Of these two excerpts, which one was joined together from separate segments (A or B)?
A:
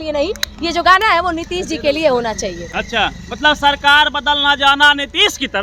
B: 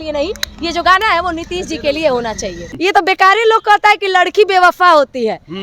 B